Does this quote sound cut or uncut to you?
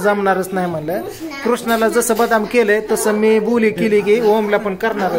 uncut